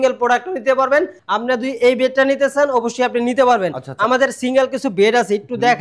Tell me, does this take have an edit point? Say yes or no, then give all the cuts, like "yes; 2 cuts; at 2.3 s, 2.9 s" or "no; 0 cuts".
yes; 1 cut; at 1.2 s